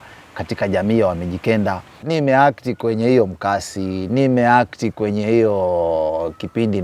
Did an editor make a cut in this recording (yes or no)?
yes